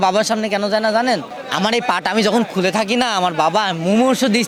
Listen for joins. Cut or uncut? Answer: uncut